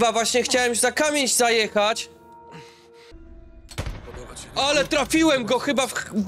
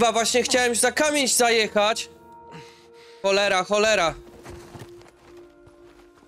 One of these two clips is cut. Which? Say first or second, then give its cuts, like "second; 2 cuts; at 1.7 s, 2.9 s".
first; 1 cut; at 3.1 s